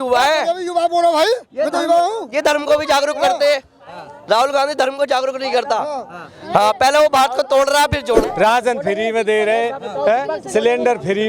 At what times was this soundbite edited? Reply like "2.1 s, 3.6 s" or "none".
8.2 s